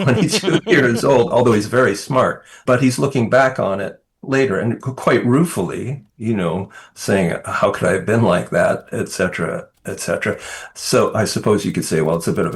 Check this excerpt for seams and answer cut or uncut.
cut